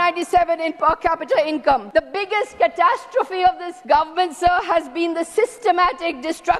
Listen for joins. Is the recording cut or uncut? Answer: cut